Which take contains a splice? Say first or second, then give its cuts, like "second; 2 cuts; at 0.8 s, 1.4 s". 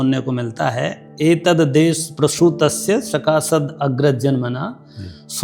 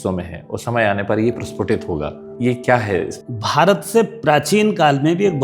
second; 2 cuts; at 2.3 s, 3.2 s